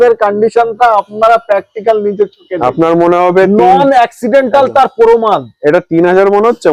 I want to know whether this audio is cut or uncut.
uncut